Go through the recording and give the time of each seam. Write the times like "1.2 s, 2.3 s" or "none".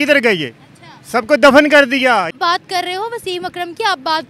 2.3 s